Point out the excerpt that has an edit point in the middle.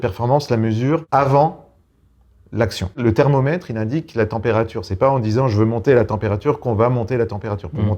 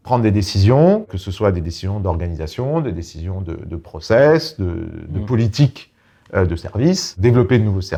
first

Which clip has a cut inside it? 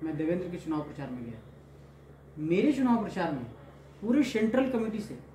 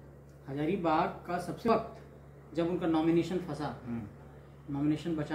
second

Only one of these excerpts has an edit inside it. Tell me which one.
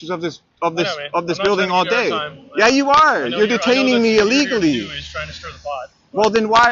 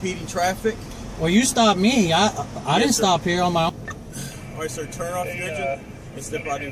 second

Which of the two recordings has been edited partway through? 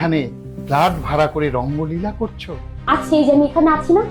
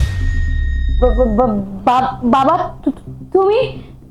first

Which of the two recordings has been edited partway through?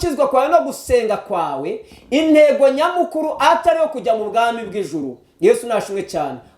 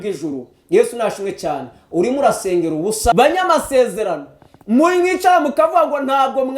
second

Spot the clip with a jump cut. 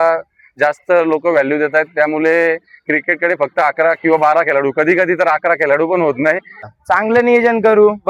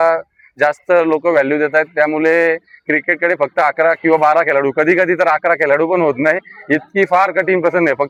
first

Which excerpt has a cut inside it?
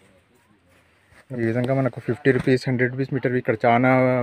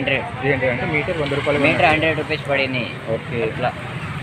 first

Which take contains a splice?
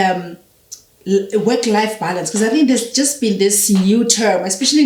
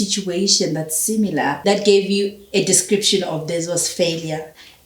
second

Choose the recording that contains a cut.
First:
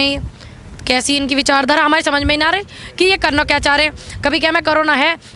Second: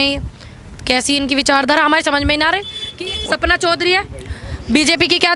second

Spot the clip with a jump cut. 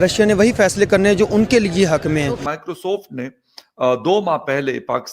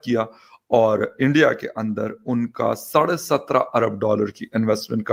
first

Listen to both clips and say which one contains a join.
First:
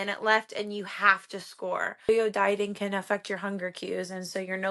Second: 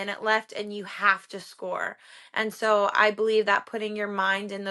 first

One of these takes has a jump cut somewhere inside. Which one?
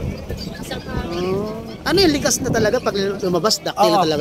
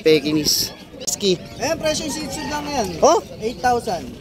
second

